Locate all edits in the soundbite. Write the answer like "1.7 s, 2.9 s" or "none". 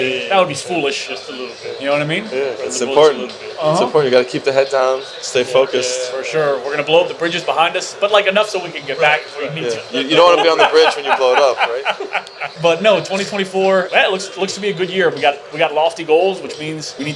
none